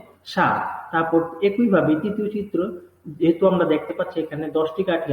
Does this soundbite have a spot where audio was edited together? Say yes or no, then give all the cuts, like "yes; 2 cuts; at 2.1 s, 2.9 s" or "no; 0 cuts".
yes; 1 cut; at 3.9 s